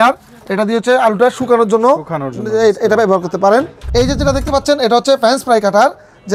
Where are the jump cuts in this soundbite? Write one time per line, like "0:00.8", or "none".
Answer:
0:03.8